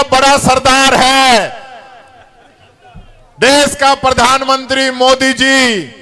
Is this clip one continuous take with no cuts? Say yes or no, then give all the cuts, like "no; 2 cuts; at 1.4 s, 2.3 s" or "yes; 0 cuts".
yes; 0 cuts